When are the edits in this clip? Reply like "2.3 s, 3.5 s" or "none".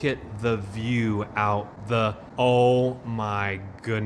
2.0 s